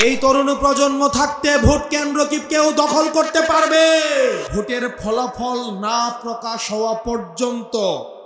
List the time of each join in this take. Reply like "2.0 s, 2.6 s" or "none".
4.5 s